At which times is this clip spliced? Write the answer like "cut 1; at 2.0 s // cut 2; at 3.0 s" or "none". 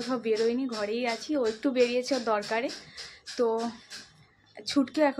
none